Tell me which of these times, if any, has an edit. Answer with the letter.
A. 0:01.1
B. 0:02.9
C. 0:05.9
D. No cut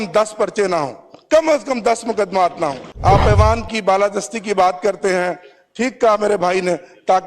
B